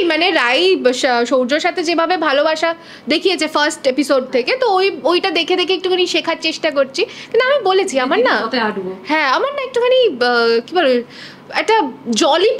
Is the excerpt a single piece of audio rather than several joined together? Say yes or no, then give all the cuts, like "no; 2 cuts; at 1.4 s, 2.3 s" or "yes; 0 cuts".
yes; 0 cuts